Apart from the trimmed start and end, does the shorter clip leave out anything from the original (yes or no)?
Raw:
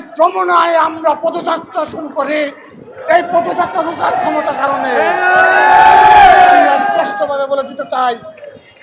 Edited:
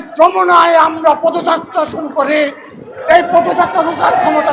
no